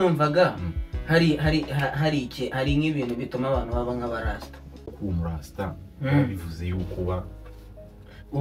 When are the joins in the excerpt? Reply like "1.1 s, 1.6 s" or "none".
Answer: 4.9 s